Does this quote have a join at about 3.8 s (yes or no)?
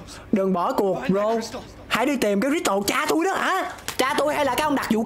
yes